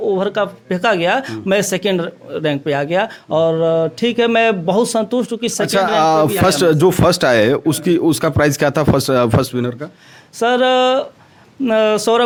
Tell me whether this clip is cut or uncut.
uncut